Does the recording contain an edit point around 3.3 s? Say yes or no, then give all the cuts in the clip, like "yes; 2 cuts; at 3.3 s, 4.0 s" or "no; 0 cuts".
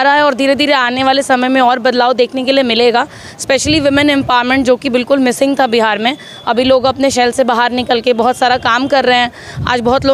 no; 0 cuts